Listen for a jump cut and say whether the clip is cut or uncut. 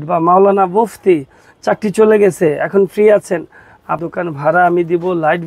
cut